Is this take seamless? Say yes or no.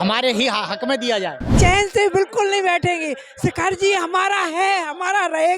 no